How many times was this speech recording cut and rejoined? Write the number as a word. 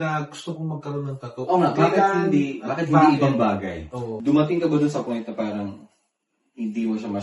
one